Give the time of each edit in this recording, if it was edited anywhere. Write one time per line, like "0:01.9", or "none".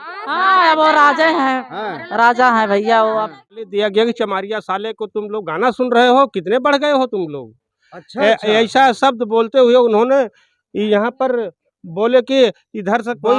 0:03.7

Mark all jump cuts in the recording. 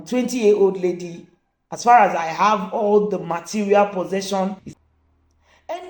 0:04.7

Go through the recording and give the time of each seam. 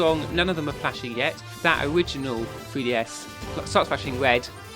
0:01.5
0:03.3

